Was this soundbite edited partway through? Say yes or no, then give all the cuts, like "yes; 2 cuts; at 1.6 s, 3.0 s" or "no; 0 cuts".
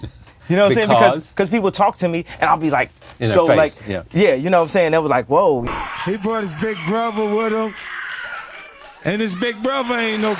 yes; 1 cut; at 5.6 s